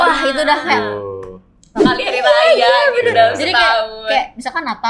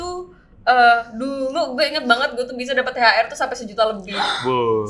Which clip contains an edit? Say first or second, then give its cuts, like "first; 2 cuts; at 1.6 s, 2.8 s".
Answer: first; 1 cut; at 1.8 s